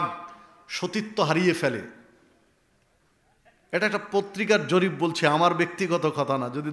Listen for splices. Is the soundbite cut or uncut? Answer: uncut